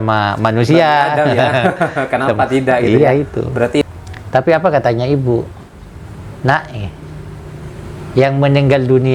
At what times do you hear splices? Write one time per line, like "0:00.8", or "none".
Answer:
0:03.8